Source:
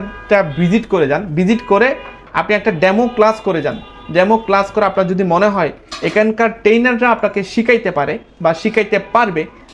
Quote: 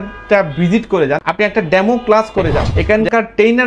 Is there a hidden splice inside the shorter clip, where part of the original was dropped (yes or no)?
yes